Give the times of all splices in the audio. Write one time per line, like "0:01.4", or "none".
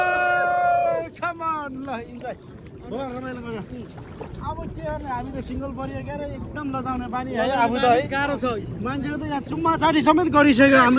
none